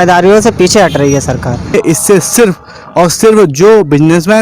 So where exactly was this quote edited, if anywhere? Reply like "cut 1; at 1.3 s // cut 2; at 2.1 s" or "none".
cut 1; at 1.7 s